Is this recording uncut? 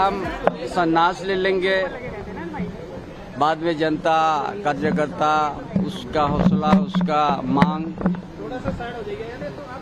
no; 1 cut; at 6.5 s

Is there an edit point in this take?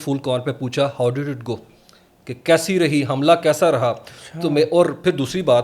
no; 0 cuts

